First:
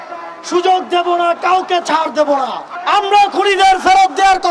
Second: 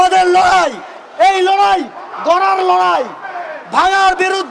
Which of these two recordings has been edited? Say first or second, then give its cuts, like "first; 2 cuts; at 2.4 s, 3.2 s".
first; 1 cut; at 2.7 s